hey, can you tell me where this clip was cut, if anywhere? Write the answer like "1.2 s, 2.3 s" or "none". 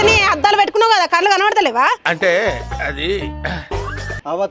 none